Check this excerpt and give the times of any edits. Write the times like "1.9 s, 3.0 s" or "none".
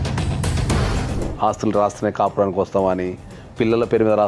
1.1 s